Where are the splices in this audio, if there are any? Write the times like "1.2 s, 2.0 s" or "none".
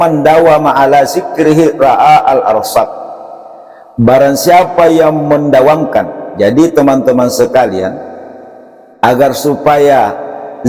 none